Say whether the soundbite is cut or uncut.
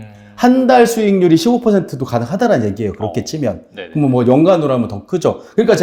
uncut